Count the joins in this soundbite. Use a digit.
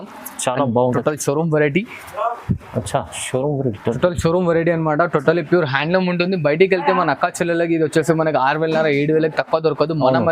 1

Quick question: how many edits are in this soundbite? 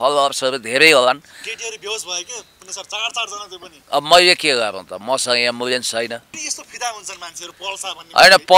1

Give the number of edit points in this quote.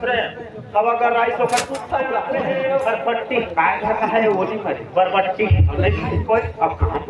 1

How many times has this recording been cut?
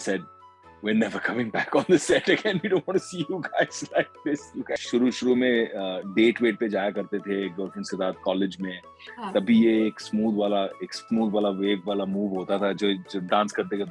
1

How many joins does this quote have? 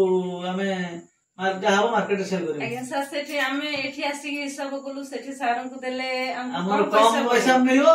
0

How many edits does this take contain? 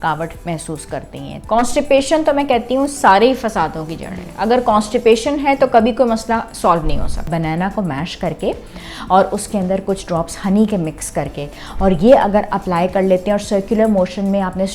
3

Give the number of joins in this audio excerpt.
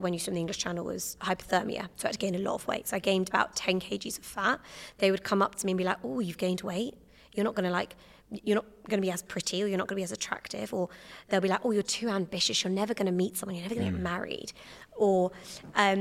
0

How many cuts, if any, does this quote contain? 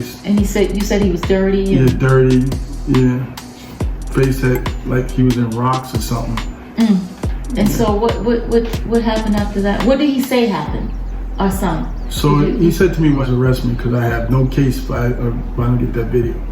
1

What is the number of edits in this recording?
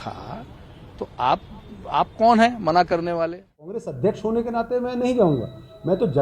1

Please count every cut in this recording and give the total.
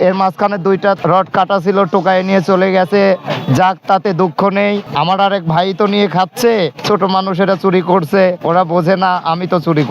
4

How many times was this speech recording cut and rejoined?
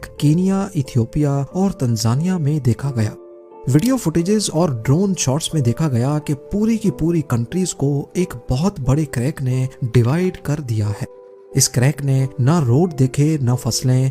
1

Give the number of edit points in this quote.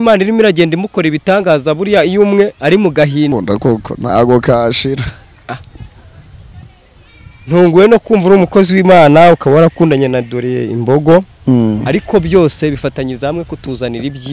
1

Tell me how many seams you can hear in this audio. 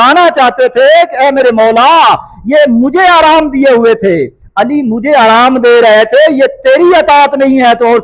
0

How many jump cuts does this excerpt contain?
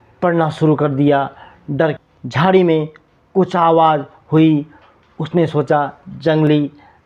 1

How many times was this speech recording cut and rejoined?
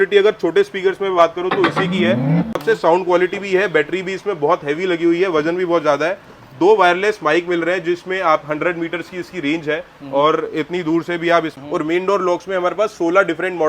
2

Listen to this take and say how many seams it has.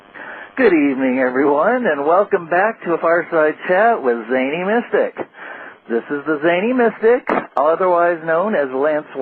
0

